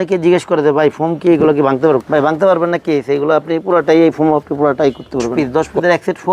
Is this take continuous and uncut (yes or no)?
no